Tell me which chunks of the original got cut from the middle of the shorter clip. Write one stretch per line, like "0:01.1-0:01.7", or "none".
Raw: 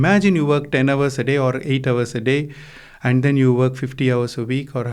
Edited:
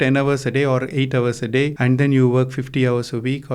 0:02.5-0:03.0

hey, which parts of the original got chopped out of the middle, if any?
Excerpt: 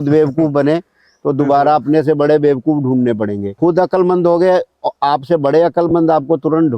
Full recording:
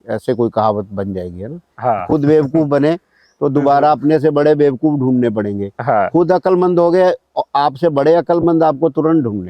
0:05.7-0:06.1

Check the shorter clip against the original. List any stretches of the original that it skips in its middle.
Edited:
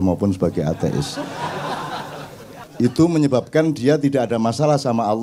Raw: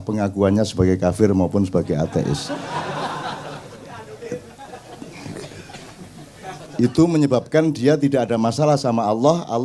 0:04.0-0:06.6

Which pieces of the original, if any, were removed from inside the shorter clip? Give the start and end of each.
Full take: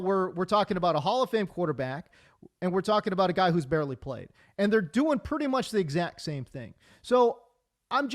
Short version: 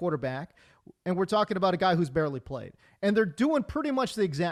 none

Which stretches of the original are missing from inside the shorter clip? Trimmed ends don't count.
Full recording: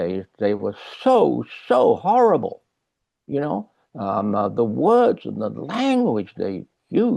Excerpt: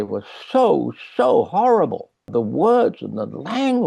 0:02.8-0:04.5

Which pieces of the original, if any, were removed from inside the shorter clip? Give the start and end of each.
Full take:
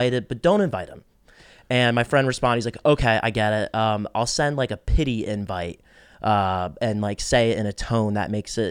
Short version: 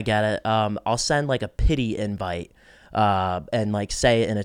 none

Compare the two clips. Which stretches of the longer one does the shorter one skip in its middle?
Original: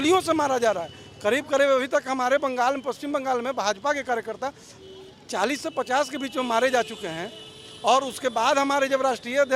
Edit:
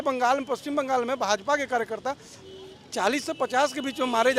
none

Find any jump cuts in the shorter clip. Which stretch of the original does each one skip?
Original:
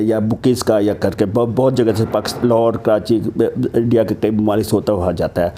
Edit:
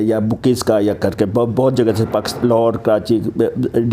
none

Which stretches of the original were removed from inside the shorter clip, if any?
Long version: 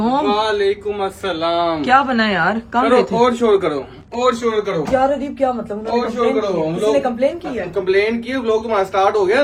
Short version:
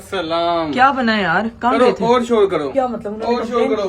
0:03.8-0:05.3

